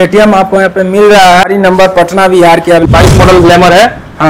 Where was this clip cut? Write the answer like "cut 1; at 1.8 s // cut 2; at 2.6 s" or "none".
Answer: cut 1; at 1.5 s // cut 2; at 2.9 s